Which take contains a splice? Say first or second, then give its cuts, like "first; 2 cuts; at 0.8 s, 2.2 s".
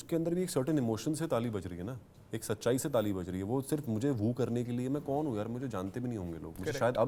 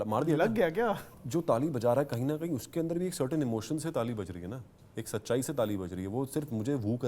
second; 1 cut; at 1.2 s